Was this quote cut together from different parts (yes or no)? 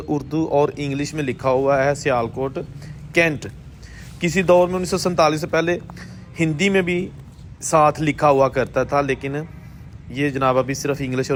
no